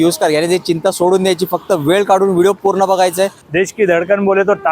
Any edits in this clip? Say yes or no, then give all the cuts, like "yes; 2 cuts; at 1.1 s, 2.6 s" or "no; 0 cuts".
yes; 1 cut; at 3.4 s